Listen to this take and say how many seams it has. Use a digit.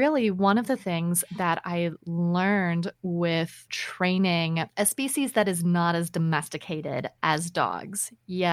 0